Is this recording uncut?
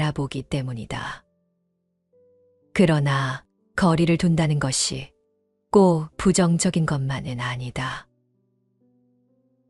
no; 1 cut; at 8.1 s

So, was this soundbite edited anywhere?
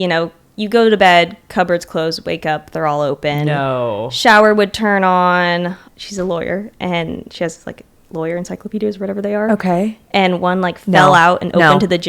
yes; 1 cut; at 5.9 s

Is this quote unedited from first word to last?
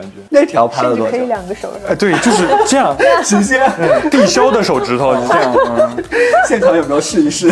yes; 0 cuts

